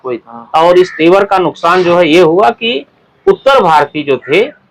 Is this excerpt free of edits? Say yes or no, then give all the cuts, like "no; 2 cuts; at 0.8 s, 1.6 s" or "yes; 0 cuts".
yes; 0 cuts